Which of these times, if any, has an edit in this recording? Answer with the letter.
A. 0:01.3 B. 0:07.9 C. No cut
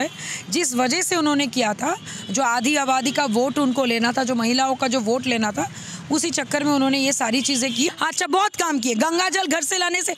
B